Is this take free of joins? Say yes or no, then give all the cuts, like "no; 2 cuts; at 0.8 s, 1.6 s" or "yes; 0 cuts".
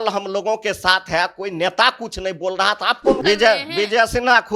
no; 1 cut; at 3.2 s